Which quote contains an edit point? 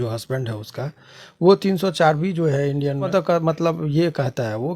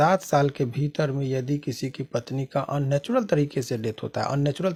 first; 1 cut; at 3.1 s

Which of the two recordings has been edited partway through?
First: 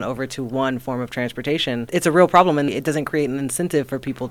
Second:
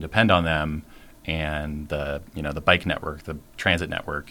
first; 2 cuts; at 1.9 s, 2.7 s

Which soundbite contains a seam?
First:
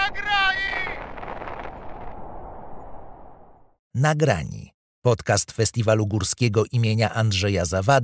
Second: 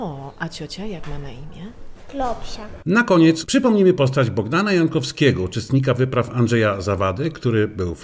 second; 1 cut; at 2.8 s

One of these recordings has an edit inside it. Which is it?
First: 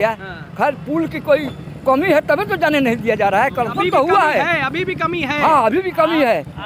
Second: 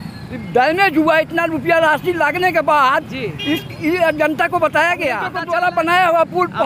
second; 1 cut; at 5.3 s

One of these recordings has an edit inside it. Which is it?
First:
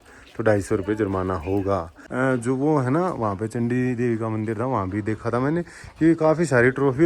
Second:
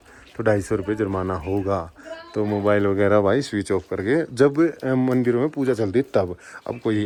first; 1 cut; at 2.0 s

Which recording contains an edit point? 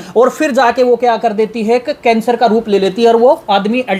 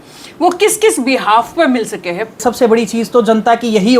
second; 1 cut; at 2.4 s

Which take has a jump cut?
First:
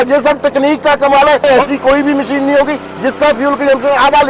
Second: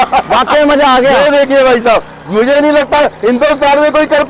first; 1 cut; at 1.4 s

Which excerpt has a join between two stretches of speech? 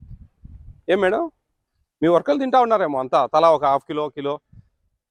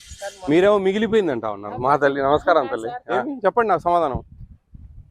second; 1 cut; at 3.3 s

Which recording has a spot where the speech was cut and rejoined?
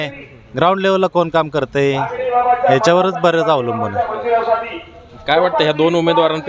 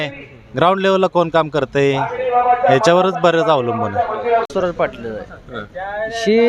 second; 1 cut; at 4.5 s

